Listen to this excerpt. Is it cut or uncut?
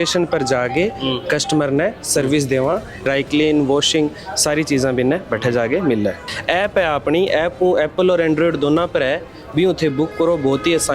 cut